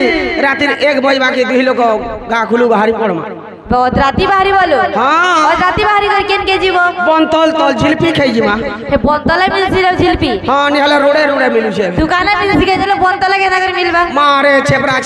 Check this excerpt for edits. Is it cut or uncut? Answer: uncut